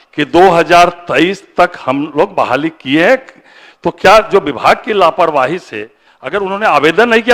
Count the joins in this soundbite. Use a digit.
0